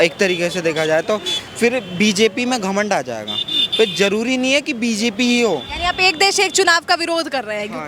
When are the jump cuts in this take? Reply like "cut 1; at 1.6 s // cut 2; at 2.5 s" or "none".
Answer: none